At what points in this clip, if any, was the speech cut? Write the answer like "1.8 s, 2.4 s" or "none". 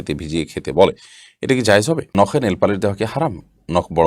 2.1 s